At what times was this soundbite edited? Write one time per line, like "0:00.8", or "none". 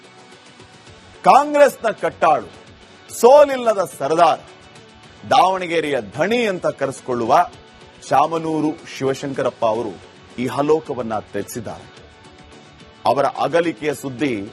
0:01.1